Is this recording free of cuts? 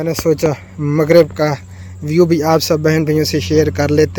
yes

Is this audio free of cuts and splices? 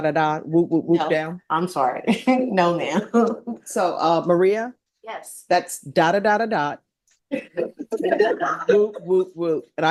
yes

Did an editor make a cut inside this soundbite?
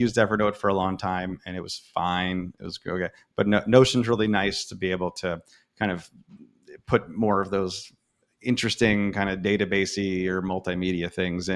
no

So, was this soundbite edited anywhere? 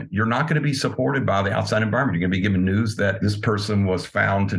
yes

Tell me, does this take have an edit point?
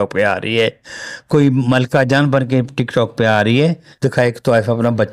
yes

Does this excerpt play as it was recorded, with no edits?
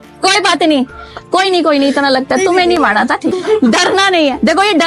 no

